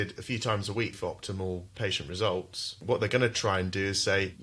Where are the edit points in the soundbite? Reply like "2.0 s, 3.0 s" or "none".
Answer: 0.9 s, 2.8 s